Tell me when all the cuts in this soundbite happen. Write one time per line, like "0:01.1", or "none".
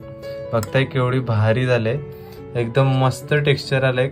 none